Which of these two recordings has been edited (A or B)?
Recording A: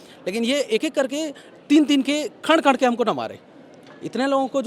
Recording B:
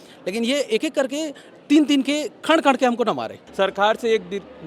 B